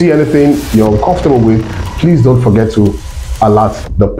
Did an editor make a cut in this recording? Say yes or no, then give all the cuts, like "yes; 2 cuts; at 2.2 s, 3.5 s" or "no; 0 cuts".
no; 0 cuts